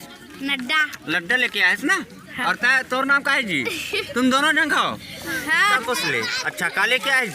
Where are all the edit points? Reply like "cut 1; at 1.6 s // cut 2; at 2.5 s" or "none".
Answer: cut 1; at 5.8 s